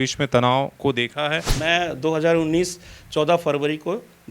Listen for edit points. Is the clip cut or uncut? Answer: cut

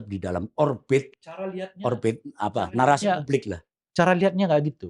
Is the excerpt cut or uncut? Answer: uncut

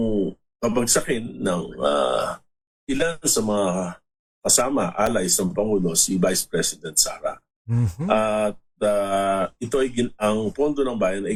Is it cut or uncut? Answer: uncut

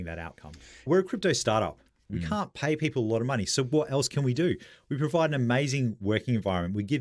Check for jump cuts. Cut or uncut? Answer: cut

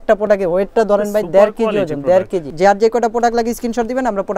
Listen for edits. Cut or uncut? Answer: cut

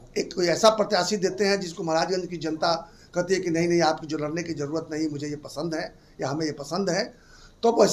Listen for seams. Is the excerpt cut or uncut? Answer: uncut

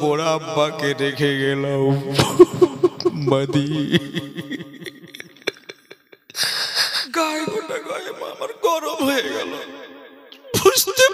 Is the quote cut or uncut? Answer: cut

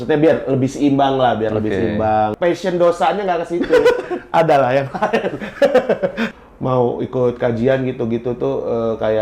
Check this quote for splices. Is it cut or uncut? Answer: cut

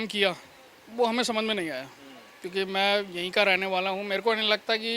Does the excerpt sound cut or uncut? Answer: uncut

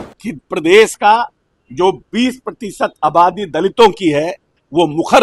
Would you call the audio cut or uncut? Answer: uncut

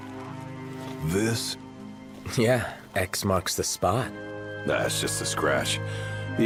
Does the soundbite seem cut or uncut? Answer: uncut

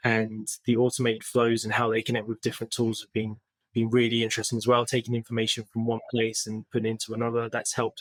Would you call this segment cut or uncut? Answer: uncut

